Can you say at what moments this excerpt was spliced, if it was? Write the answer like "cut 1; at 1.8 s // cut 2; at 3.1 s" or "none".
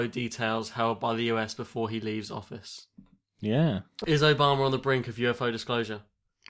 none